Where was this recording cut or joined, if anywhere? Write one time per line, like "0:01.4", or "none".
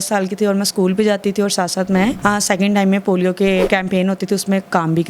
0:02.2
0:03.7

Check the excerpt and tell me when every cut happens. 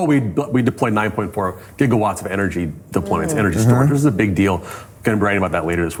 none

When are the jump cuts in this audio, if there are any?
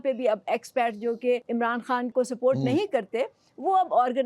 0:01.9

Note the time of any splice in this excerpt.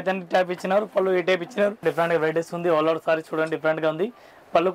0:01.8

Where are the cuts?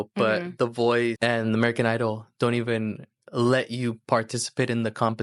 0:01.2

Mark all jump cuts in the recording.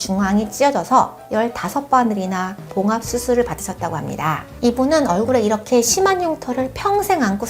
0:04.5

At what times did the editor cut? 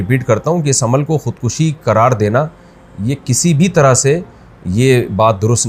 none

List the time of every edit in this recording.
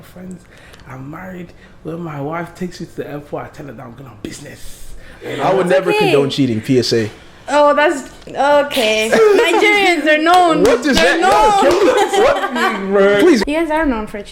0:05.3
0:13.4

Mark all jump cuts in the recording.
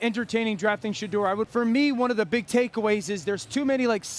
0:01.5

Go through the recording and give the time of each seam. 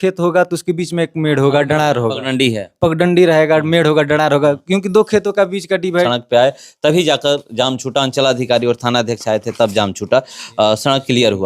0:06.1

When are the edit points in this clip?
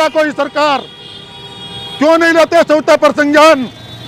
none

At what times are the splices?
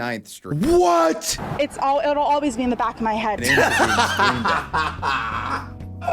0:01.4
0:03.4

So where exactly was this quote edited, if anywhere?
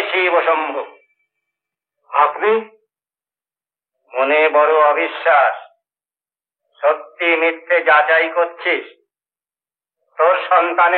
none

